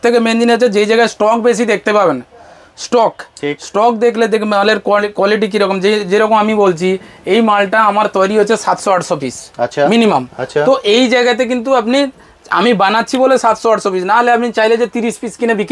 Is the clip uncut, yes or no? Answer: yes